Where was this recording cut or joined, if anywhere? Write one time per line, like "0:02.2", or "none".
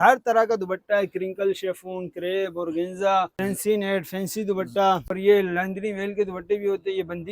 0:03.3
0:05.1